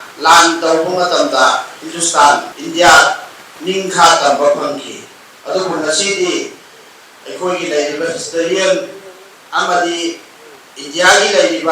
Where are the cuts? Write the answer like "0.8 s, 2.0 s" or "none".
2.6 s